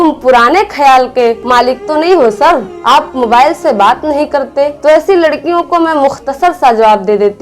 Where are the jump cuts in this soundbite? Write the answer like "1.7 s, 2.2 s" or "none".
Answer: 1.4 s